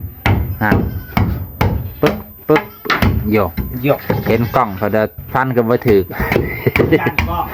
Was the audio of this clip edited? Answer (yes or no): no